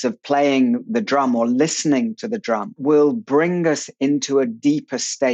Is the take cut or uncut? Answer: cut